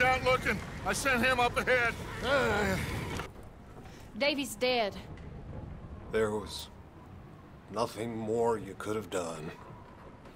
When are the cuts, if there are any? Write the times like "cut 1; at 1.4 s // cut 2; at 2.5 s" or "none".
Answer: cut 1; at 3.3 s